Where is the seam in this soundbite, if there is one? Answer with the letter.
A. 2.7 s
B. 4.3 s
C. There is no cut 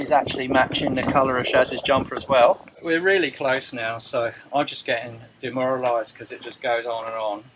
A